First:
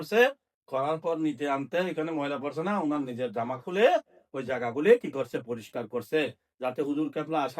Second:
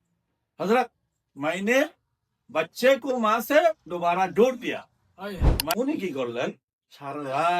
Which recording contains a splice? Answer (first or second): second